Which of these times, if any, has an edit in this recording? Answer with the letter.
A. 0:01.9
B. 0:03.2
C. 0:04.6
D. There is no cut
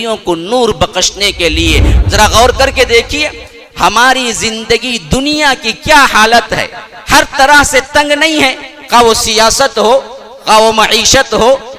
A